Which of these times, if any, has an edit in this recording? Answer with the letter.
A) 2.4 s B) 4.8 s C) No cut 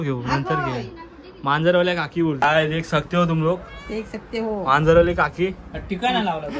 A